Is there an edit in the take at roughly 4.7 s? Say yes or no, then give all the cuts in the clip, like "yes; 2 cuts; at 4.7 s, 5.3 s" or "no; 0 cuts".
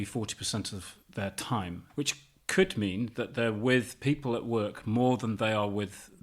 no; 1 cut; at 1.8 s